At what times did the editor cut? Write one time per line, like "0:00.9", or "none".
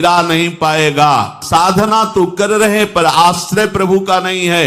0:01.4